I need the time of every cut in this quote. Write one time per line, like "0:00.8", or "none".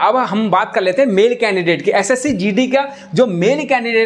none